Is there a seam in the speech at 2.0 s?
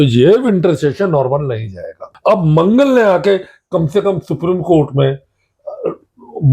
yes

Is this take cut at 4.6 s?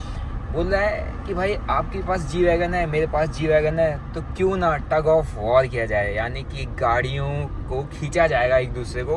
no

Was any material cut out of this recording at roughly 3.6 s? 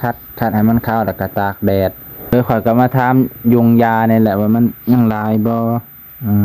no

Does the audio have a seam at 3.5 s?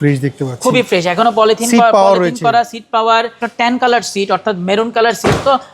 yes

